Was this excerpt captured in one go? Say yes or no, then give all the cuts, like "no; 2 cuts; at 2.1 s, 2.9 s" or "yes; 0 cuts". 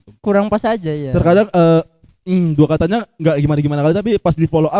yes; 0 cuts